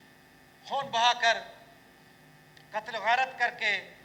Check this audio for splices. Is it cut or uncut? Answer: uncut